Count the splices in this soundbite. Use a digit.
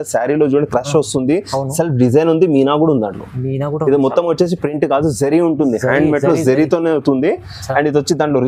0